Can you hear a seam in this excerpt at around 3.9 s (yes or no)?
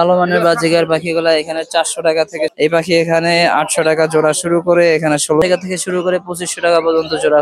no